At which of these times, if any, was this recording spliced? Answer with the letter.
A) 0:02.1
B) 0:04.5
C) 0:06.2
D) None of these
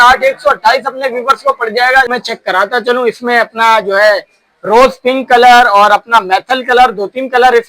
A